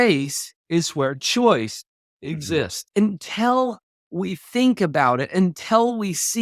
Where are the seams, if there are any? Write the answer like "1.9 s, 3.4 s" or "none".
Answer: 2.8 s